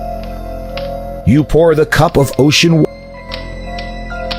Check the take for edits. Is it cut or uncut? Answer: uncut